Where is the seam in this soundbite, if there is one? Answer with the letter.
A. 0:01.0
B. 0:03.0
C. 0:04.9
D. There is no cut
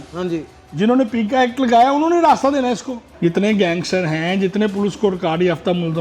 B